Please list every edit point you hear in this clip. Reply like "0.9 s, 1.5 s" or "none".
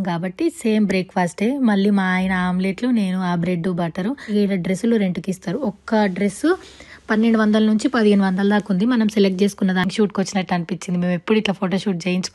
4.3 s, 9.9 s